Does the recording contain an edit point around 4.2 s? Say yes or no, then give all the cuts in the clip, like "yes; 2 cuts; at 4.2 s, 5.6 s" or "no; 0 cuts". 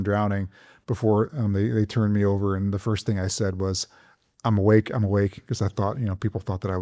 no; 0 cuts